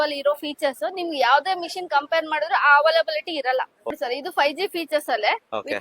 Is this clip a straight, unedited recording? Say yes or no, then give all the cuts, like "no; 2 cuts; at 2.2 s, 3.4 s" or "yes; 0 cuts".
no; 1 cut; at 4.0 s